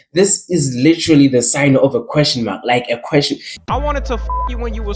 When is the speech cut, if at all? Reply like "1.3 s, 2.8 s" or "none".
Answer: 3.5 s